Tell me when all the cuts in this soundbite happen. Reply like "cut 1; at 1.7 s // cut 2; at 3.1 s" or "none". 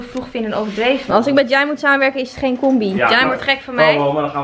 cut 1; at 1.0 s // cut 2; at 3.0 s